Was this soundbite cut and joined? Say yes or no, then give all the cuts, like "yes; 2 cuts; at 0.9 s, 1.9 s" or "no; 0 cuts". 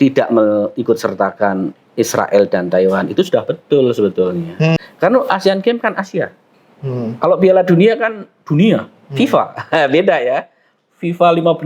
yes; 1 cut; at 4.8 s